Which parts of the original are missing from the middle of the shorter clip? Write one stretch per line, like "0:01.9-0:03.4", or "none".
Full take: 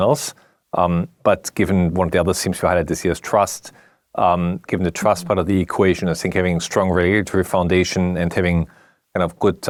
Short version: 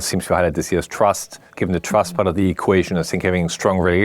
0:03.8-0:04.6